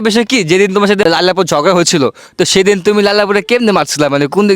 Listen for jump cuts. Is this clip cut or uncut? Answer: cut